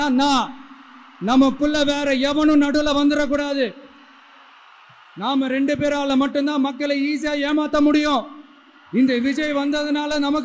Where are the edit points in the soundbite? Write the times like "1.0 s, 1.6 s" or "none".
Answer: none